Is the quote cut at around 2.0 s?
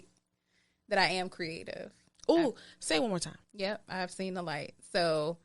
no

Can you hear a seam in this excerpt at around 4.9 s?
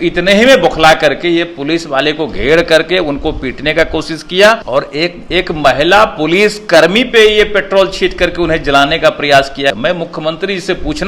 yes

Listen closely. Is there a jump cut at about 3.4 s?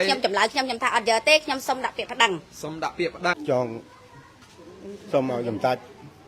yes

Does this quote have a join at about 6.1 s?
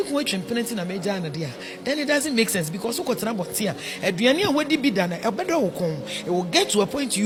no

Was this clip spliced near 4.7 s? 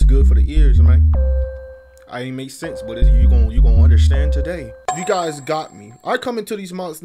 yes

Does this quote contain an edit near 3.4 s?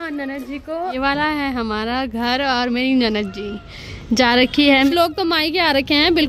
no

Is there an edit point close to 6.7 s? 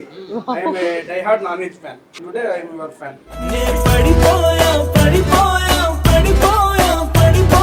no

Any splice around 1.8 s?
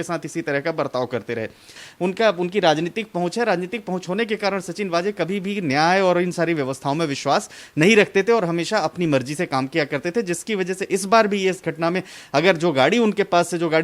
yes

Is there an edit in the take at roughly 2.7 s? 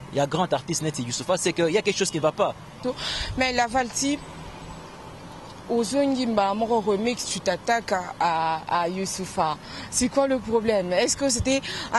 yes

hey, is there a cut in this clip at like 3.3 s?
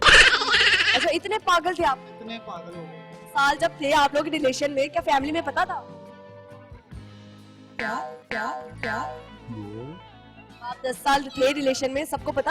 yes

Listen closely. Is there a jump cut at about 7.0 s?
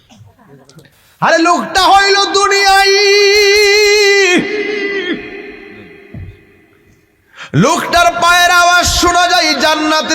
no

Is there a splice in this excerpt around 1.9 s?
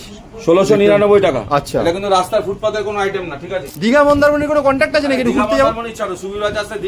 no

